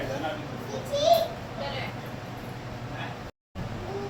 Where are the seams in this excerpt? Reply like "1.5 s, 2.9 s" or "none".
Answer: none